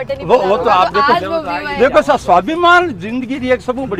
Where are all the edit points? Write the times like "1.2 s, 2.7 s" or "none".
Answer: none

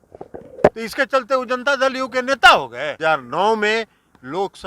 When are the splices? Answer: 3.0 s

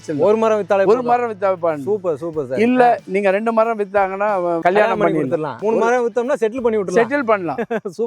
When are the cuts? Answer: 4.6 s, 5.5 s

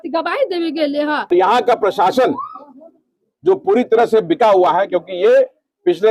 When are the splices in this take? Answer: 1.3 s

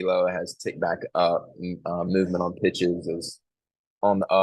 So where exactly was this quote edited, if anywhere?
none

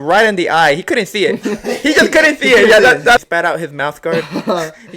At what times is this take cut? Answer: 3.2 s

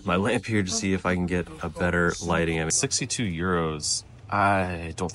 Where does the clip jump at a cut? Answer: 2.7 s

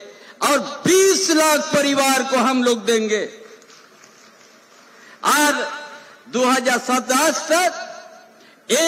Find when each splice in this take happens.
none

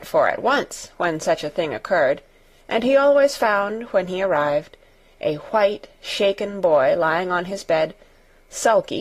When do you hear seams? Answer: 4.5 s

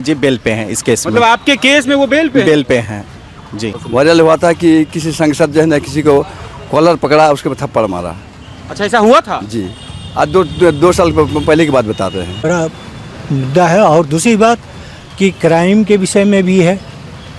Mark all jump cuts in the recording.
3.8 s, 12.4 s

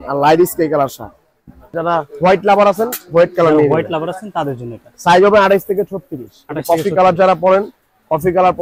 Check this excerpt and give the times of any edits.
1.7 s

